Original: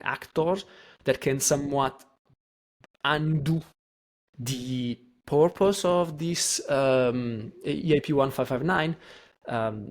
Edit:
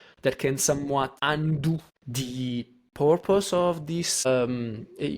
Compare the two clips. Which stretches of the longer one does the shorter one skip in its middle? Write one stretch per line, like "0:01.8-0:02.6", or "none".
0:02.0-0:03.0
0:03.8-0:04.3
0:06.6-0:06.9